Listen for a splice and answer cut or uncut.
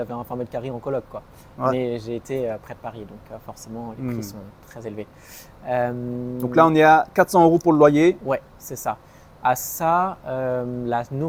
uncut